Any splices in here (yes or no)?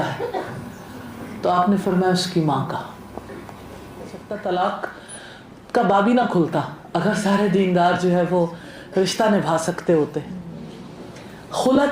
yes